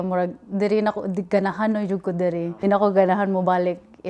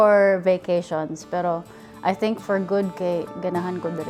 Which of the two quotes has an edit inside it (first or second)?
first